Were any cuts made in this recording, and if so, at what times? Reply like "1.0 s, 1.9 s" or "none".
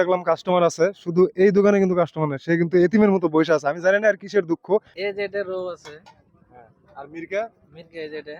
5.0 s

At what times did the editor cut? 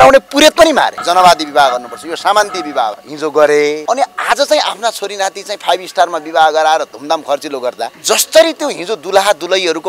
1.0 s, 3.1 s, 3.8 s, 7.9 s

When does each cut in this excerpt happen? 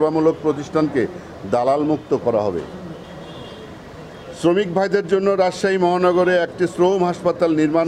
3.0 s

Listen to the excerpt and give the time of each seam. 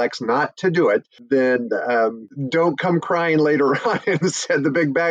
1.1 s, 2.3 s

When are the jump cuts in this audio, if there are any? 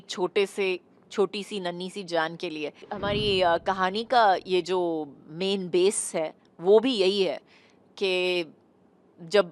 2.9 s

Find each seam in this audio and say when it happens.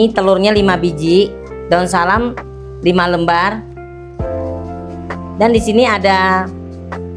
3.6 s, 5.4 s

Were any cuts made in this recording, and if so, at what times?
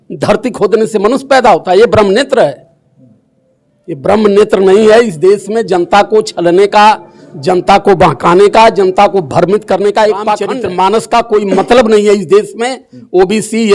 10.5 s

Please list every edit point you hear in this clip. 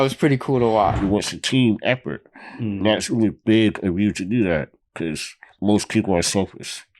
1.0 s

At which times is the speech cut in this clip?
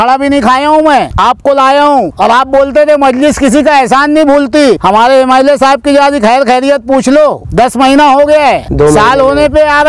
1.1 s, 2.1 s, 4.8 s, 7.4 s, 8.7 s

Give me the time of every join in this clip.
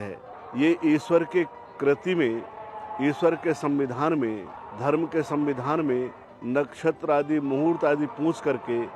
none

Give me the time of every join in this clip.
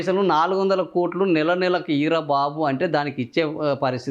none

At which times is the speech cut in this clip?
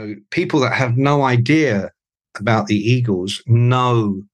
none

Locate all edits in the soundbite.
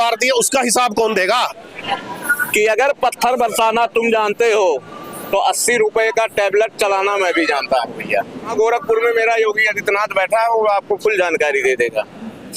1.7 s, 8.5 s

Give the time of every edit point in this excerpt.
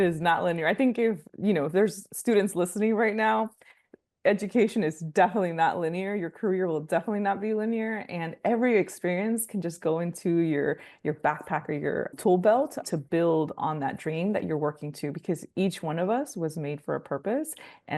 1.3 s, 12.1 s, 12.8 s

